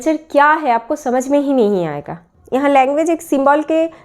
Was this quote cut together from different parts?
yes; 1 cut; at 2.2 s

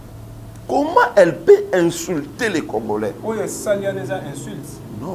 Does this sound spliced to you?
no; 0 cuts

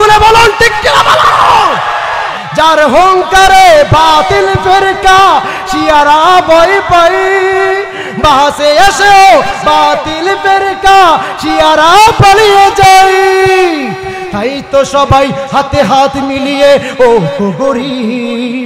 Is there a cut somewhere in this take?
no; 0 cuts

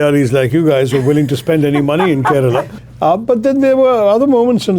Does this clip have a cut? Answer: yes; 1 cut; at 2.8 s

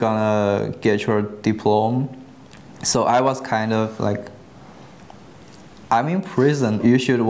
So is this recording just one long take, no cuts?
yes; 0 cuts

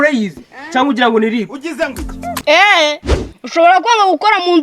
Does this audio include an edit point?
yes; 1 cut; at 2.4 s

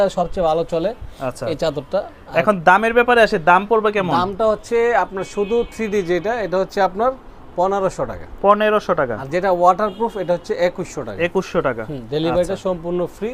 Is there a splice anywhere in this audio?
no; 0 cuts

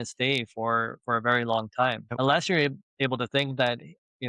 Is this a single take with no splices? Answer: no; 1 cut; at 2.1 s

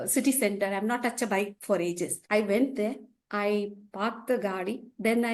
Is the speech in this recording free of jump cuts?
no; 1 cut; at 2.2 s

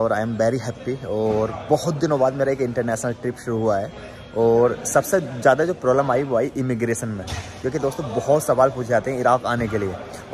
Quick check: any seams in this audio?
no; 0 cuts

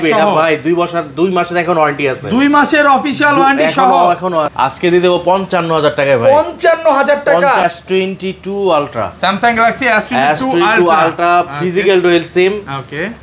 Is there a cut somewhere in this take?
yes; 2 cuts; at 4.5 s, 7.6 s

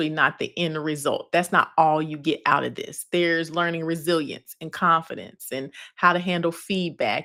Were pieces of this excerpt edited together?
no; 0 cuts

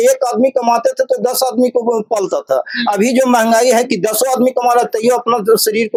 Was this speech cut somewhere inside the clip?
no; 0 cuts

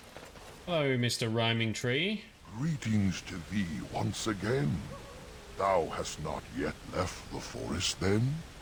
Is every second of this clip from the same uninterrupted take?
yes; 0 cuts

